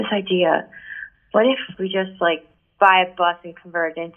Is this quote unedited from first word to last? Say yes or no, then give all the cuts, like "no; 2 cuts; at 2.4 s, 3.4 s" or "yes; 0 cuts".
no; 1 cut; at 1.7 s